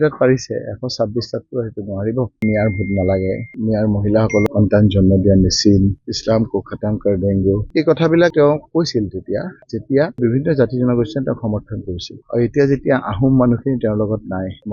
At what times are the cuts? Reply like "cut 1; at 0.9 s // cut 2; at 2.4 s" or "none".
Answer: cut 1; at 2.4 s // cut 2; at 4.5 s // cut 3; at 7.6 s